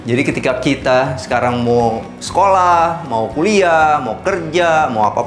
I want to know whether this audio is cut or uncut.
uncut